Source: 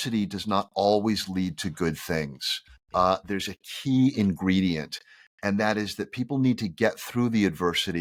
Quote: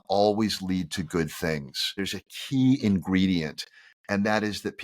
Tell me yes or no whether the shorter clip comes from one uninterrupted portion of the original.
no